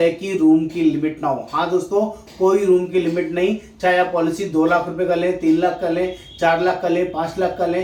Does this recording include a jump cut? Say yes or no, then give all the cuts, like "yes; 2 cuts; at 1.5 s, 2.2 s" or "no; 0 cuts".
no; 0 cuts